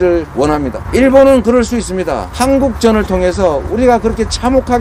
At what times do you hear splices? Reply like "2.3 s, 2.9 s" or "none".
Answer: none